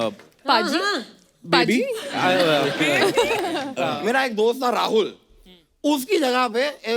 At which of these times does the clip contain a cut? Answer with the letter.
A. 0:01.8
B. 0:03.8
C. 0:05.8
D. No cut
B